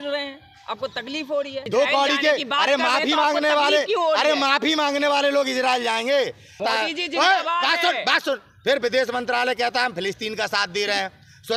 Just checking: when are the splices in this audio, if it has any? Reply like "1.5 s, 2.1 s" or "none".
1.6 s, 6.6 s